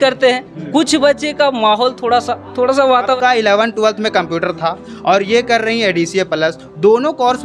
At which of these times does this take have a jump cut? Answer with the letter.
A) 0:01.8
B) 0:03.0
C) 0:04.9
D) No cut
B